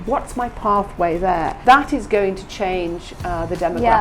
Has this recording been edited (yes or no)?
yes